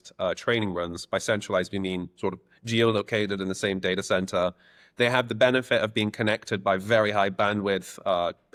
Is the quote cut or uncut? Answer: uncut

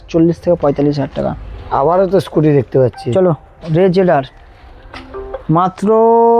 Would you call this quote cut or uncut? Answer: uncut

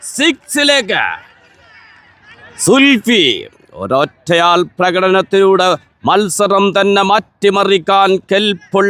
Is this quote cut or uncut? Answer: uncut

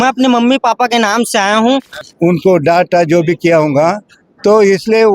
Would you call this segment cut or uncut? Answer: cut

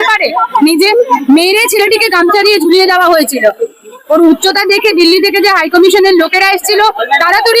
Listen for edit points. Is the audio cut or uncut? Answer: uncut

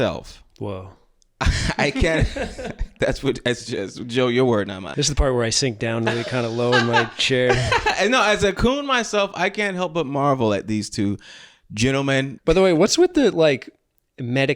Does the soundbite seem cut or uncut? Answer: cut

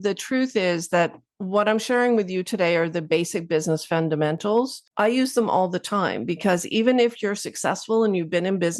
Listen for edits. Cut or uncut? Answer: cut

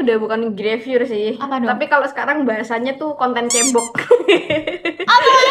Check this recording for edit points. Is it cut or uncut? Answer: uncut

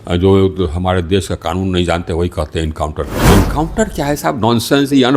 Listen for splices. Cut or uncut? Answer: cut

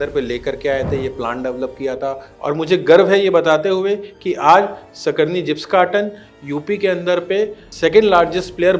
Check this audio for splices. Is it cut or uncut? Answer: cut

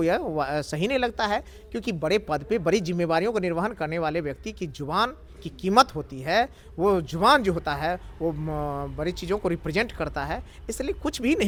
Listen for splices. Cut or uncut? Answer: uncut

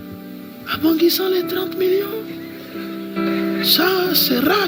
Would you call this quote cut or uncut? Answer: uncut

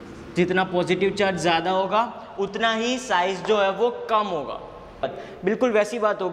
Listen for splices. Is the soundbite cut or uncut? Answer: cut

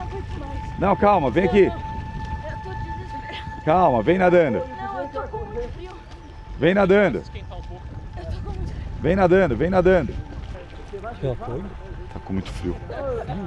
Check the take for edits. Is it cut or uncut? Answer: uncut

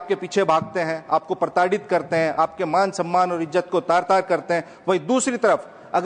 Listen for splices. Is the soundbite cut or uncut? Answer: uncut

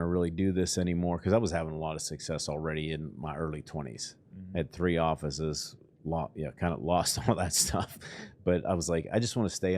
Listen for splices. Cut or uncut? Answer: uncut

